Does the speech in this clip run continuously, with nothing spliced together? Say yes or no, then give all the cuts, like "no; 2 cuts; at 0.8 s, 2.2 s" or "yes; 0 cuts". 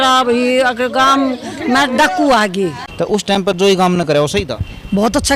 no; 1 cut; at 3.1 s